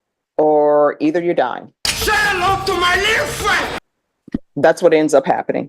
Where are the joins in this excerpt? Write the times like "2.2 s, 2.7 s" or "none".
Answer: 3.9 s